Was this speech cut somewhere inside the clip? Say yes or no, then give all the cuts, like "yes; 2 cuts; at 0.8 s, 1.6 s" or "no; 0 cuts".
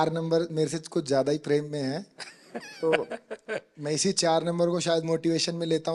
no; 0 cuts